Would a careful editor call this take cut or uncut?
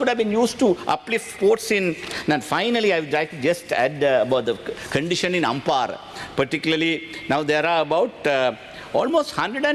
uncut